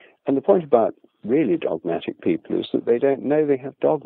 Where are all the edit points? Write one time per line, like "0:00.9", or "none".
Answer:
none